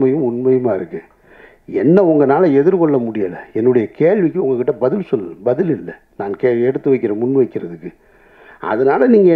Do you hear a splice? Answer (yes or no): no